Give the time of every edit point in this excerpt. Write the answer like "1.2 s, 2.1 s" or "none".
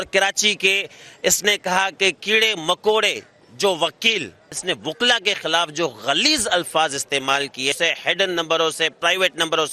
4.5 s, 7.7 s